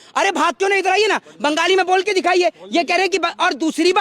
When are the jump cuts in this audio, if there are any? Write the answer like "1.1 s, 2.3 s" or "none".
none